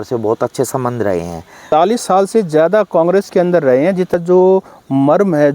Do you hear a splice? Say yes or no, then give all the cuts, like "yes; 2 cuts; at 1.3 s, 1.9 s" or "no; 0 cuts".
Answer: yes; 2 cuts; at 1.6 s, 4.1 s